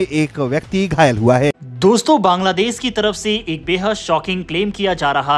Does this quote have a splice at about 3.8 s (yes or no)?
no